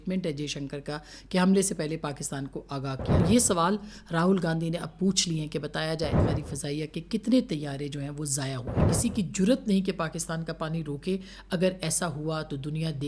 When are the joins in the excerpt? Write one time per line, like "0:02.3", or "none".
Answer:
0:03.2
0:06.2
0:08.8